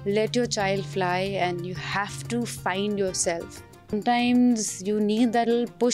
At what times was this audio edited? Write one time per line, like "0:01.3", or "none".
0:03.9